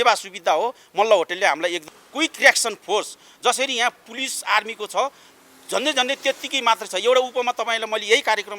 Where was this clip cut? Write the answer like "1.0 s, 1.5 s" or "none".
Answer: 1.8 s

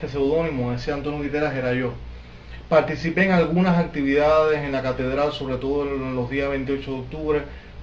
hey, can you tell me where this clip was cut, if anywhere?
2.3 s

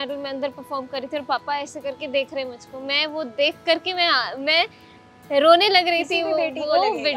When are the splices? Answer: none

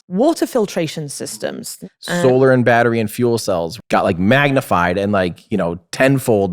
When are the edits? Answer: 1.7 s, 3.7 s

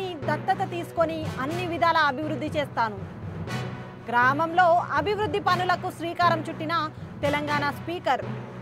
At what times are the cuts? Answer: none

